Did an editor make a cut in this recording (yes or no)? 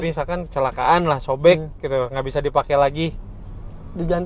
no